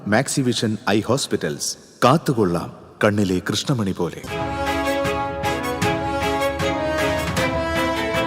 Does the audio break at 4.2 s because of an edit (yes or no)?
yes